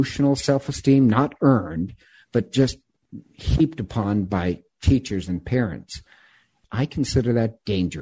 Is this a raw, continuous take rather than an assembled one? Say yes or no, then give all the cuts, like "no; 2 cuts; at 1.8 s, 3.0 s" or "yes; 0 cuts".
no; 1 cut; at 6.6 s